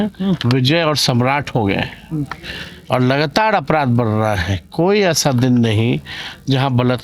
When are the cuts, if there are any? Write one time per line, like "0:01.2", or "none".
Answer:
none